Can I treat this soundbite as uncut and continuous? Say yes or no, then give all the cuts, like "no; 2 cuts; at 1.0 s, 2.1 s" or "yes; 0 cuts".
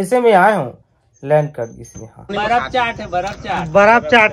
no; 1 cut; at 2.3 s